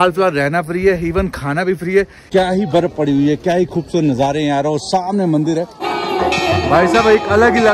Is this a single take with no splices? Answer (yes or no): no